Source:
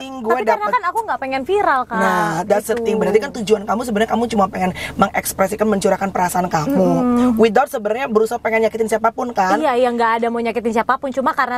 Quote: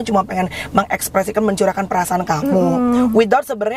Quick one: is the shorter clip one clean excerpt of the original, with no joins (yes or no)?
yes